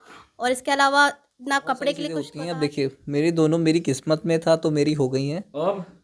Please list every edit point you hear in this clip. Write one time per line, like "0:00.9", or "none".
0:02.3